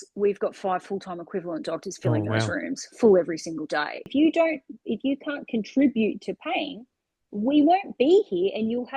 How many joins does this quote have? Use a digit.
1